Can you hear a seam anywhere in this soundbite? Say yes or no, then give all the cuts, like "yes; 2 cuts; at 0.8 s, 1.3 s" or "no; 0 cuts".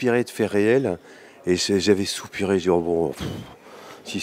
no; 0 cuts